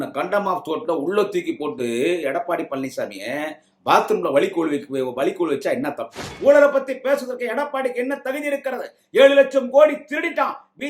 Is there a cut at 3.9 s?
no; 1 cut; at 6.3 s

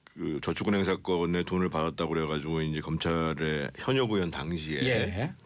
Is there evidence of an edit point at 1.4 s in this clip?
yes; 1 cut; at 1.4 s

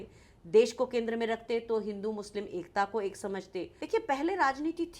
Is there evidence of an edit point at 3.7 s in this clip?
yes; 1 cut; at 3.7 s

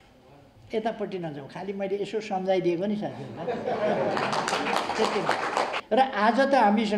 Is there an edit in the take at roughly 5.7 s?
yes; 1 cut; at 5.7 s

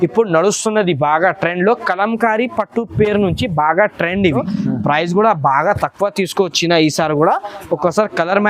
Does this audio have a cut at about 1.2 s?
no; 1 cut; at 4.5 s

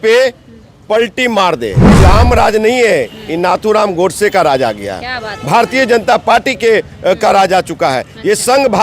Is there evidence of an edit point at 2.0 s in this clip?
yes; 1 cut; at 2.0 s

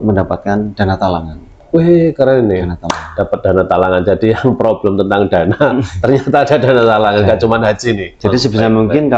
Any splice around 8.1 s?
yes; 1 cut; at 8.1 s

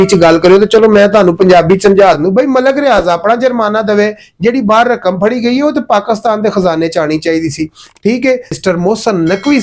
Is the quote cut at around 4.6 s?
no; 2 cuts; at 2.2 s, 8.6 s

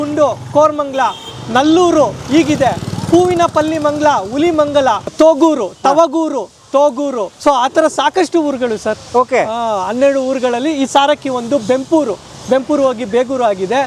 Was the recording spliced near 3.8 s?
no; 2 cuts; at 5.1 s, 7.3 s

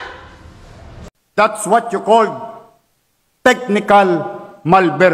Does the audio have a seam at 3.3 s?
no; 1 cut; at 1.2 s

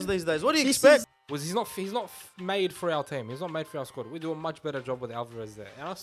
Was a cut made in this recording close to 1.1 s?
yes; 1 cut; at 1.1 s

